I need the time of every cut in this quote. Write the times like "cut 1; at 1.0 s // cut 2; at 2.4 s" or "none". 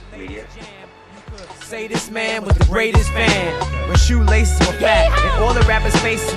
cut 1; at 3.2 s